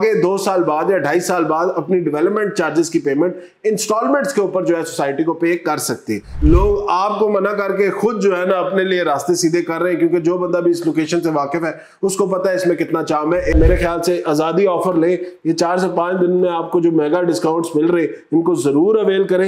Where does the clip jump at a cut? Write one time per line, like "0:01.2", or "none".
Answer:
0:06.3
0:13.5

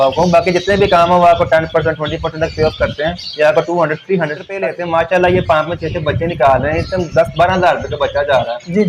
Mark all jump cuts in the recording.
0:04.7

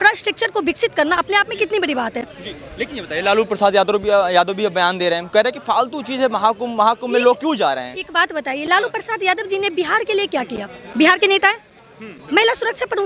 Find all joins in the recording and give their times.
none

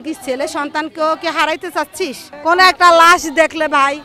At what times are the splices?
0:02.3

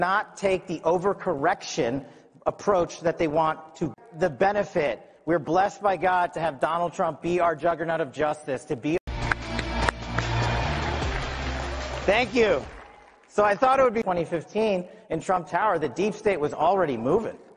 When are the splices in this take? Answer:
none

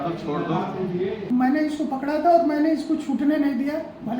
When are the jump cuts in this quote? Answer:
0:01.2

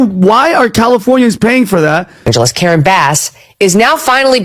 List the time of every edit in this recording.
0:02.3

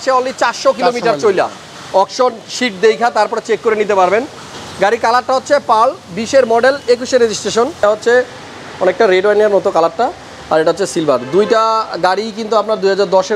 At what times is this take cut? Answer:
0:07.8

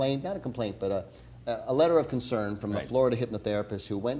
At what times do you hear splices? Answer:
none

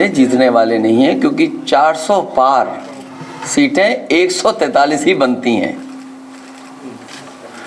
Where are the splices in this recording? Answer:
none

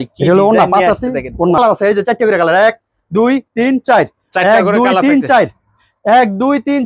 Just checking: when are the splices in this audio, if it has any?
0:01.6

